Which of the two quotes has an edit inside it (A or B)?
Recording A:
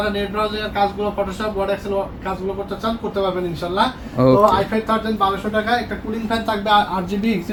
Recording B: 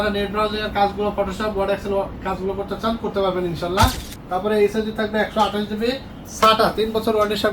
B